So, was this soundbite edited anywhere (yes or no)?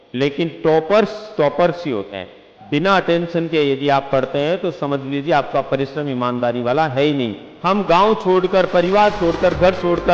yes